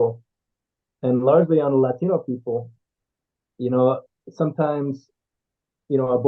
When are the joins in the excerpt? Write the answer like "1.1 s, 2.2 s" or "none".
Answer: none

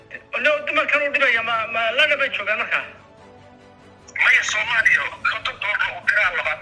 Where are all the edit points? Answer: none

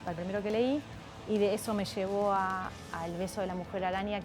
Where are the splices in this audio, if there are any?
none

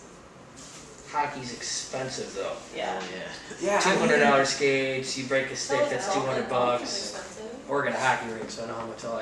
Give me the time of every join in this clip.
none

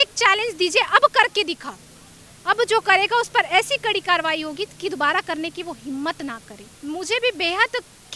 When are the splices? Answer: none

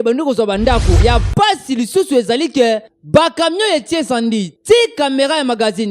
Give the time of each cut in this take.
1.0 s

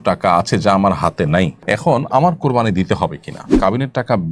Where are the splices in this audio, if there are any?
1.6 s, 3.5 s

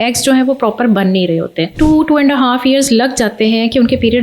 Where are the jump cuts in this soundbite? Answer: 1.7 s

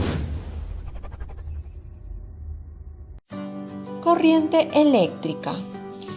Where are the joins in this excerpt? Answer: 2.6 s

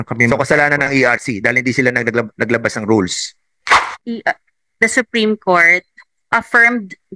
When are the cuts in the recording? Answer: 3.8 s

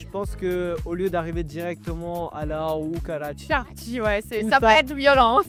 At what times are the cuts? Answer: none

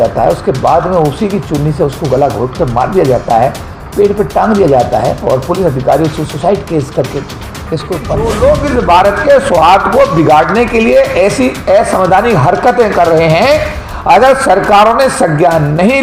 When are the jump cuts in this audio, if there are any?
8.2 s

